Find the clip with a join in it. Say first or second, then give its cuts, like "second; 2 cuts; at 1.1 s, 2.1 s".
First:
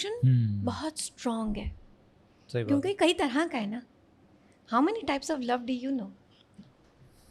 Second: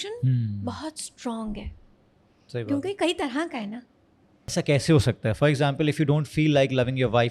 second; 1 cut; at 4.5 s